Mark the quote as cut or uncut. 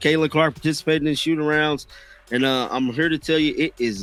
uncut